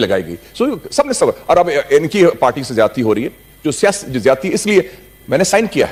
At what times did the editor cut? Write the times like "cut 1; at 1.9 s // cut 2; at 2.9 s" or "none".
none